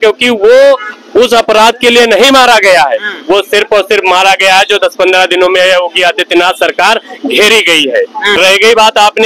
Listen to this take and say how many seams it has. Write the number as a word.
one